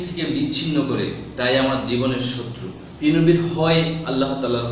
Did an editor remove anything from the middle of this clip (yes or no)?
no